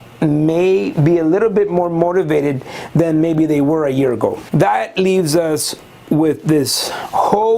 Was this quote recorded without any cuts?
no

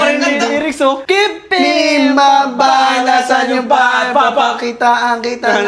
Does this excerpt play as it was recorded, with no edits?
no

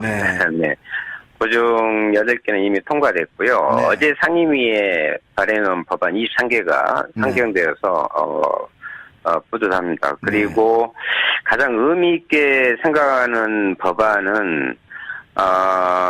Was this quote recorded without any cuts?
no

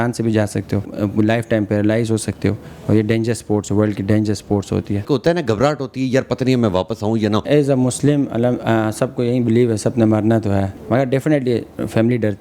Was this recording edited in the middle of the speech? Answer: yes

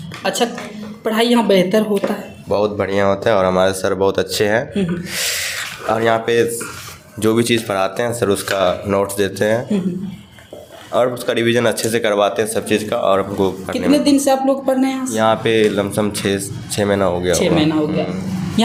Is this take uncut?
yes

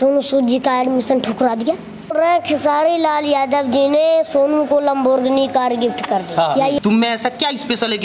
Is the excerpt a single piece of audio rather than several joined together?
no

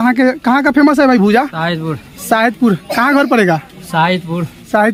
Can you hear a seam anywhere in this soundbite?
no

